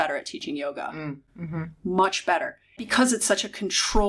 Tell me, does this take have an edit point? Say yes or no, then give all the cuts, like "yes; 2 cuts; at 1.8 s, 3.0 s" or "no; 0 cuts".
yes; 1 cut; at 2.8 s